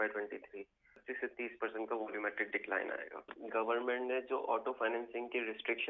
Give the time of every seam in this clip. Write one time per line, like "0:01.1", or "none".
0:01.1
0:03.3